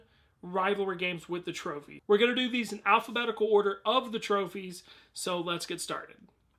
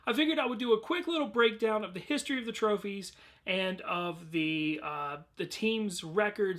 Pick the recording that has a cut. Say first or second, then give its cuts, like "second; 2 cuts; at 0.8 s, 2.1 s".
second; 1 cut; at 4.8 s